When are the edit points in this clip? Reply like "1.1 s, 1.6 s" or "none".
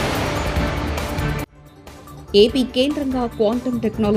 none